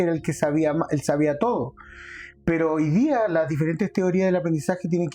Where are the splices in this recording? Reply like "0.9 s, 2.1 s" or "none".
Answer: none